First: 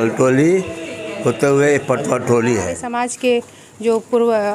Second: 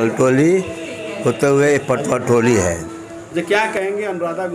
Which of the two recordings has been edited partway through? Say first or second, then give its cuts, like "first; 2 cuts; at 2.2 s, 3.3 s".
first; 1 cut; at 2.8 s